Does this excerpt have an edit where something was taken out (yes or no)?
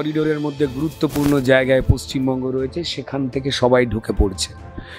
no